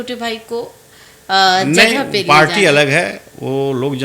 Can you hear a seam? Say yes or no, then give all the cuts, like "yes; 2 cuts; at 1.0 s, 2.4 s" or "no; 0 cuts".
no; 0 cuts